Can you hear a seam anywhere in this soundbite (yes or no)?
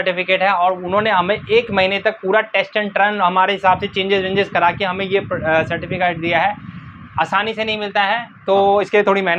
no